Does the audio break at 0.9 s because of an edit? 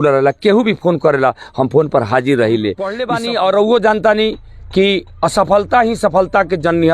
no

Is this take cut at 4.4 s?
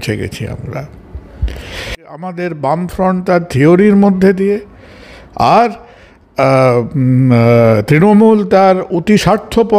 no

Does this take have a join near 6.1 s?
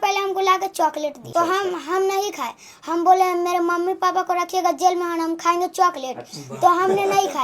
no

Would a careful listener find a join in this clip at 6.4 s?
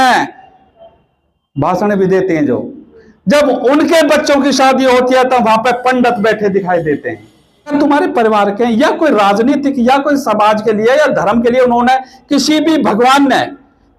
no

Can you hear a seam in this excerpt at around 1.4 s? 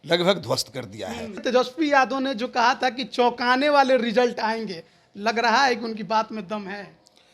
yes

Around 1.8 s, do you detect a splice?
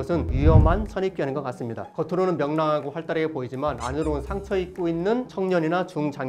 yes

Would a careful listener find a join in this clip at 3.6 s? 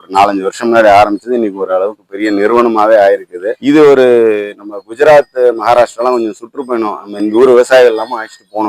yes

